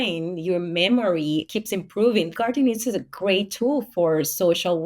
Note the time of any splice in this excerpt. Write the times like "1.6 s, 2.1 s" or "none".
2.3 s